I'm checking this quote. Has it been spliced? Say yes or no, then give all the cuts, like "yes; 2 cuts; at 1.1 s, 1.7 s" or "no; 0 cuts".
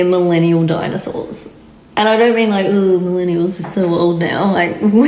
no; 0 cuts